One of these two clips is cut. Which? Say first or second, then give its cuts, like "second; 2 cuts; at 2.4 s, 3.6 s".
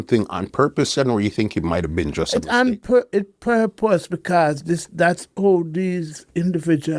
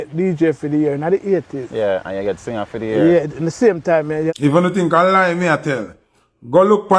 second; 1 cut; at 4.3 s